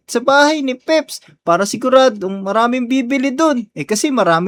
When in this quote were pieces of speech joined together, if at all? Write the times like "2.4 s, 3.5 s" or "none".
none